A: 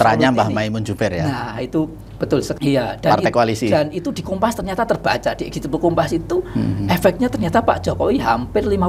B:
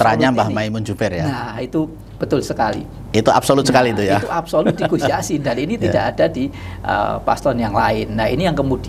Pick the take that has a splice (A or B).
A